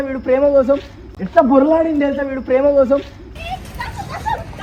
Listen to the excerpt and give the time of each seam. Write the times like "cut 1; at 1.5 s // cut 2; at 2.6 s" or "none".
none